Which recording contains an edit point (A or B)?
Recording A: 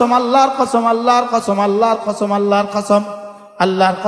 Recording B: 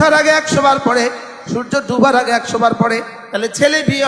B